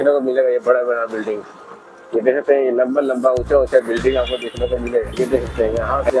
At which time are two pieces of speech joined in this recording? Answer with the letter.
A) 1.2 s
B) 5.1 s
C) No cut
B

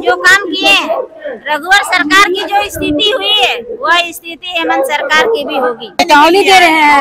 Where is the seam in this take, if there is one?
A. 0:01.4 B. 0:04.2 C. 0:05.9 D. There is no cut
C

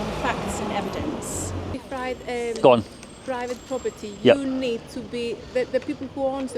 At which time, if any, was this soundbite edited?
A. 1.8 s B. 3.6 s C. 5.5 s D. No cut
A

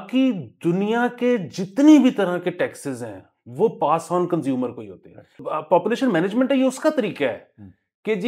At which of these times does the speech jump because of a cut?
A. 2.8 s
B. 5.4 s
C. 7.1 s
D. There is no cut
B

